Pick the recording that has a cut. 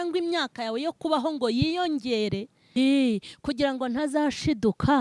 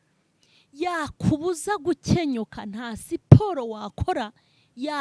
first; 1 cut; at 2.8 s

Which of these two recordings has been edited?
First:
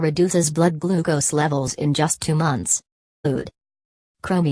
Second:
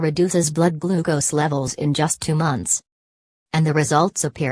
second; 1 cut; at 3.3 s

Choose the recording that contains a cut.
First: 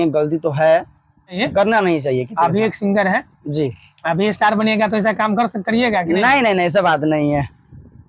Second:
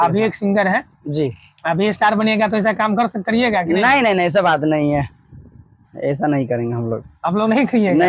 first; 1 cut; at 1.4 s

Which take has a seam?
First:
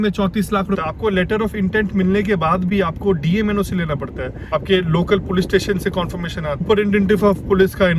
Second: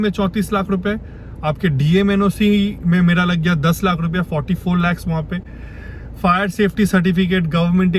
first; 3 cuts; at 0.8 s, 4.3 s, 6.6 s

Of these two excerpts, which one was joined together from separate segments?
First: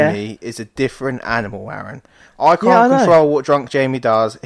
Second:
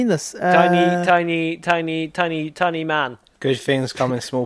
second; 1 cut; at 3.2 s

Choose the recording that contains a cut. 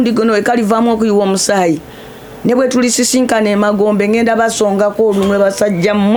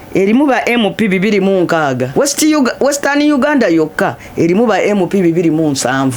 second; 1 cut; at 2.1 s

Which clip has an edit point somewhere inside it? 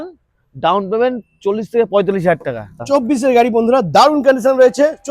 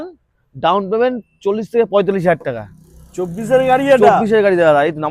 first; 1 cut; at 2.8 s

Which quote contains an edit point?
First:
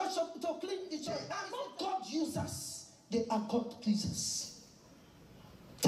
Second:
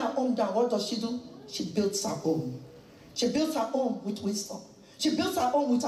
first; 1 cut; at 1.3 s

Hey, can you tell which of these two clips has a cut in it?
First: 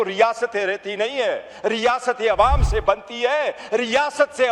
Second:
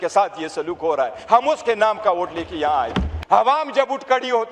second; 1 cut; at 3.1 s

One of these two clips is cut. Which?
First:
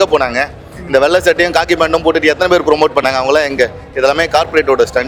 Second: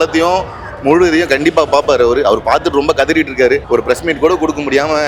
second; 1 cut; at 3.6 s

